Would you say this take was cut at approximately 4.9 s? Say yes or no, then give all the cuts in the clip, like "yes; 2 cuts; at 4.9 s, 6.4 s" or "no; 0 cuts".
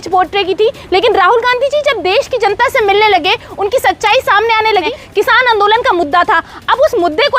yes; 1 cut; at 4.9 s